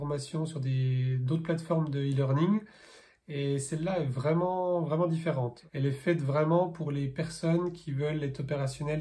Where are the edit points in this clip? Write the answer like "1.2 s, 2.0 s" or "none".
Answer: 5.6 s